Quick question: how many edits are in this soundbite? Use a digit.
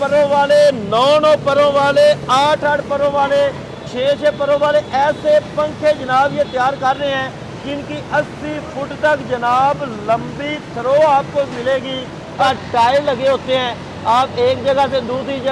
1